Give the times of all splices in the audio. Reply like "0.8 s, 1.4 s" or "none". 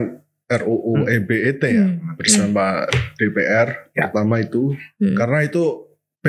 none